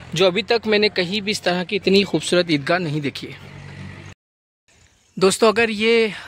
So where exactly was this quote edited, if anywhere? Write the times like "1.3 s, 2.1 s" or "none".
4.0 s